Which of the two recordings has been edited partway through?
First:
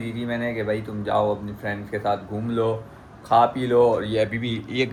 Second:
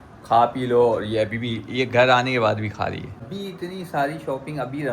second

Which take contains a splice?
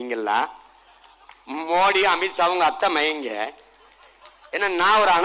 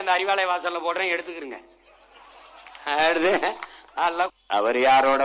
second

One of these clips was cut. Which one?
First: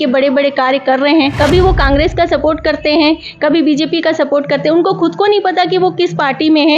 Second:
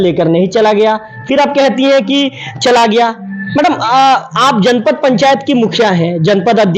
first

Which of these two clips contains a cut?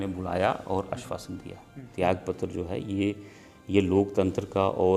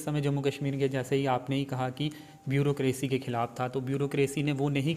first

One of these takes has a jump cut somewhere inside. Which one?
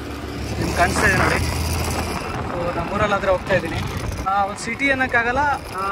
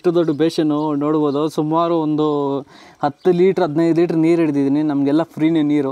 first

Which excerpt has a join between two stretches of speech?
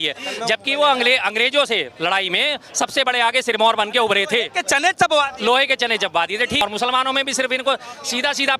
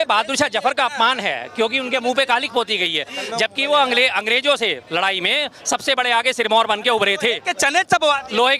first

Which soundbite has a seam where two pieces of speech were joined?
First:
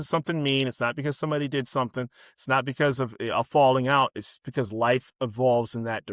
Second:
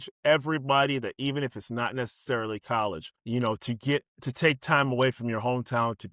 second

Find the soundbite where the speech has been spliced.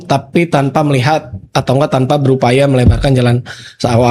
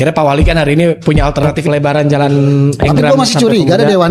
second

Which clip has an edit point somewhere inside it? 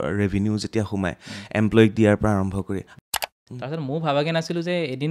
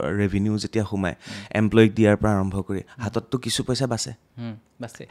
first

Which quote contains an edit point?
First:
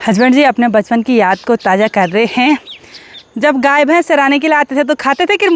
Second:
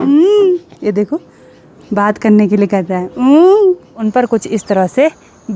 second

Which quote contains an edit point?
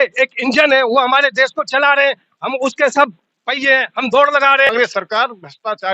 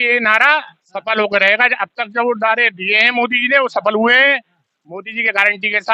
first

